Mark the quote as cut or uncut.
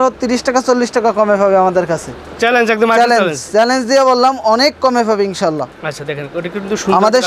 uncut